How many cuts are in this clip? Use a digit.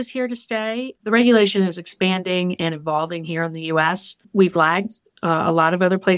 1